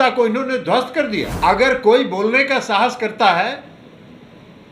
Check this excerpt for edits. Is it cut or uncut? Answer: cut